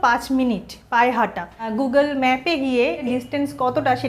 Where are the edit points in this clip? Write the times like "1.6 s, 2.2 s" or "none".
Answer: 1.7 s, 3.0 s